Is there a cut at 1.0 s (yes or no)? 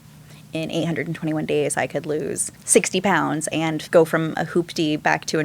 no